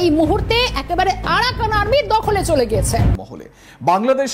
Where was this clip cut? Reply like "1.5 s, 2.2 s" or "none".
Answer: 3.1 s